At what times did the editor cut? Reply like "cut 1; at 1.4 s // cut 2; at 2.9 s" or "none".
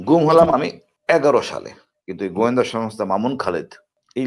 cut 1; at 1.8 s